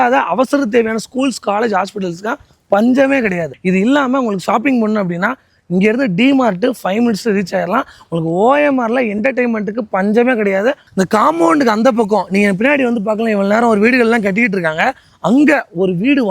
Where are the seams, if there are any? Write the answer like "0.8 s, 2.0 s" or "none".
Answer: 3.5 s, 10.8 s